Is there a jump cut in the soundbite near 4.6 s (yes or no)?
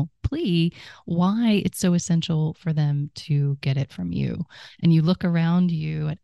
yes